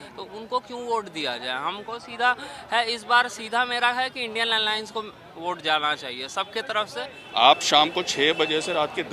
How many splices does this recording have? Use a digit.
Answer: 1